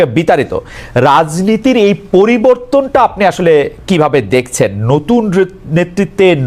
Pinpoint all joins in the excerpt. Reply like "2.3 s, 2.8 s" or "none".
none